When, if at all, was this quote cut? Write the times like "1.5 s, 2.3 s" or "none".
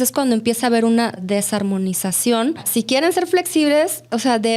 1.2 s, 2.6 s